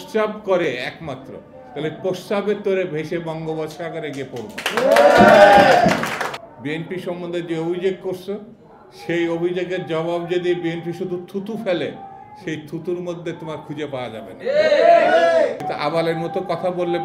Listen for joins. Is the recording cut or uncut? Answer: cut